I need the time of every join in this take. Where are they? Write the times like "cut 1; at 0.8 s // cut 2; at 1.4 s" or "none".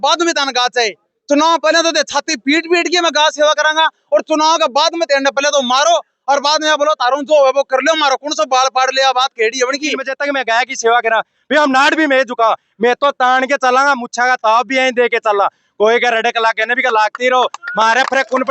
cut 1; at 10.1 s